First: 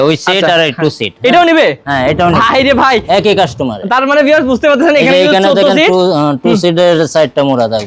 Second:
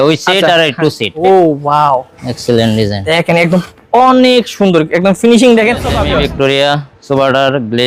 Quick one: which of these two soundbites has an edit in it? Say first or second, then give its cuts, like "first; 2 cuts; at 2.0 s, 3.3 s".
second; 2 cuts; at 1.1 s, 5.9 s